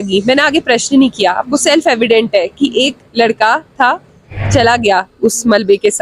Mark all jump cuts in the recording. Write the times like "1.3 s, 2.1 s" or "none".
none